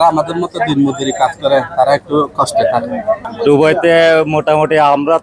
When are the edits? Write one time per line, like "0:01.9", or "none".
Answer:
none